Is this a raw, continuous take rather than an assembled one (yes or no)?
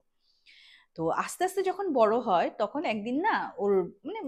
yes